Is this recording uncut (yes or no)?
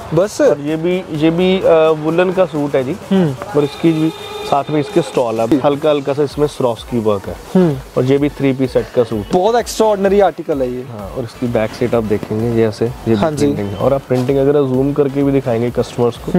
no